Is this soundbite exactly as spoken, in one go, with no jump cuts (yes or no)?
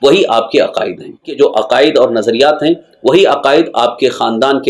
no